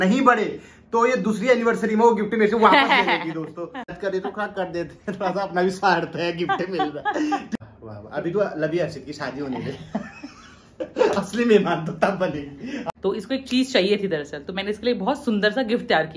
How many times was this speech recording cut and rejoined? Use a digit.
3